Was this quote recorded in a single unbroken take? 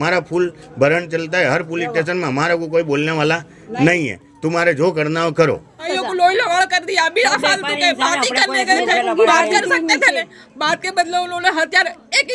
no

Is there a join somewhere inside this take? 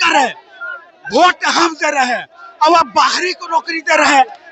no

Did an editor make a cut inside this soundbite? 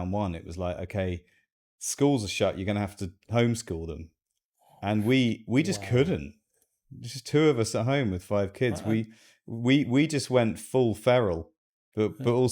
no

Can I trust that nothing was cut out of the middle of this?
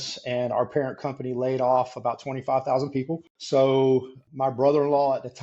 no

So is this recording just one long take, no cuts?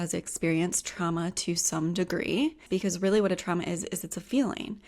no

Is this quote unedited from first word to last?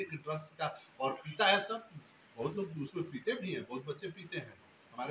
yes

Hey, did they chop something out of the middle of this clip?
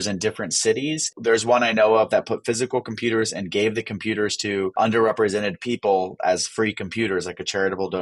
yes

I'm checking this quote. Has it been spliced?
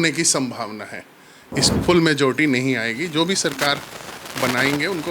yes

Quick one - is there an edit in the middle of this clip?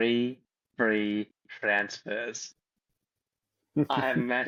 no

